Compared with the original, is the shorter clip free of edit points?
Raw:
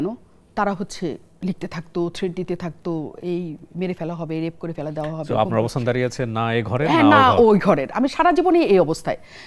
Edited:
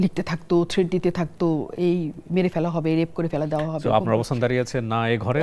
yes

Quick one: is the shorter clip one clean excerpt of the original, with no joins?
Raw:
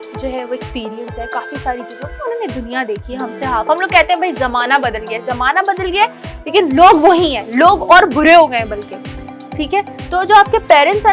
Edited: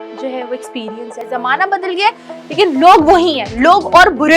no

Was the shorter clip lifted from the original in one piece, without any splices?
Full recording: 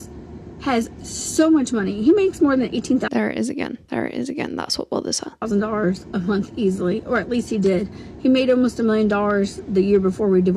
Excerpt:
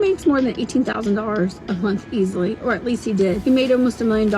no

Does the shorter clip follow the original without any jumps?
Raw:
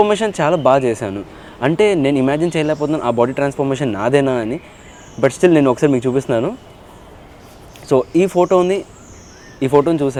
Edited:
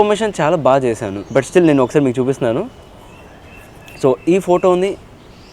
no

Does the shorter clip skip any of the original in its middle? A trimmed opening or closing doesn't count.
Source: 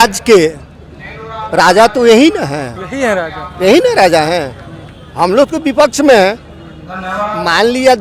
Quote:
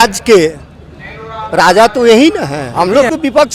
yes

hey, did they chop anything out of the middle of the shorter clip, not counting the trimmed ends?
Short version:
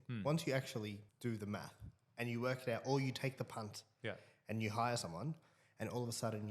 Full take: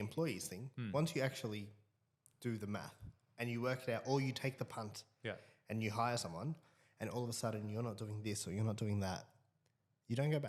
yes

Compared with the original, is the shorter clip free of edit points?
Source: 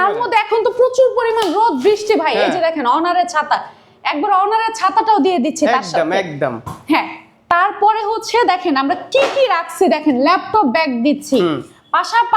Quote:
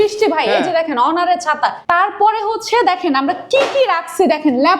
no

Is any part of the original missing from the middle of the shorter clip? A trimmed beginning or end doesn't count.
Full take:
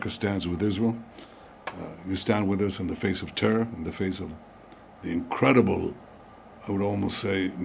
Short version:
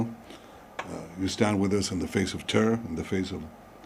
no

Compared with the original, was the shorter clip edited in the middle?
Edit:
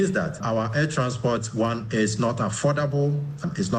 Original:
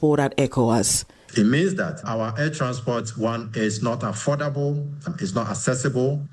no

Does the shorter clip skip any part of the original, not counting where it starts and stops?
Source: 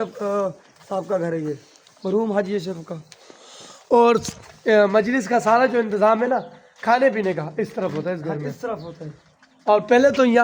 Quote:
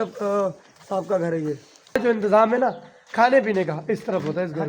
yes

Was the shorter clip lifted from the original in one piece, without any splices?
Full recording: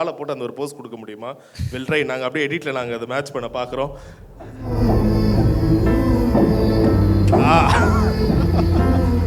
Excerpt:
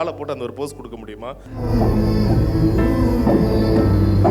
no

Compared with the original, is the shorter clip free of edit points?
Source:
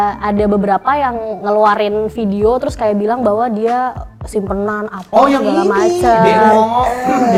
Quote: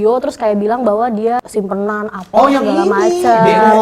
no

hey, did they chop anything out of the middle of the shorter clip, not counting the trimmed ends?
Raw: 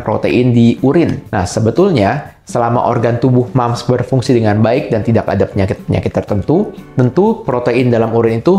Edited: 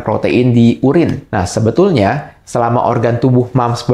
no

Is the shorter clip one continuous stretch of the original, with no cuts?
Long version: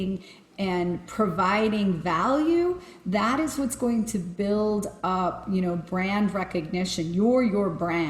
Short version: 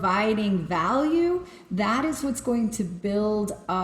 yes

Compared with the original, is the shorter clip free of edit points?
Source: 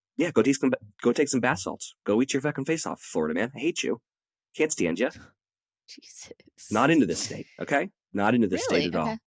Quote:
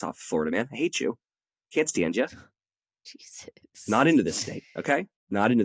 yes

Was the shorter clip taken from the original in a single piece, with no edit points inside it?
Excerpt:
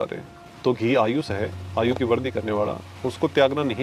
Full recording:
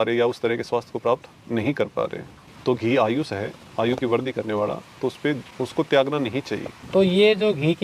no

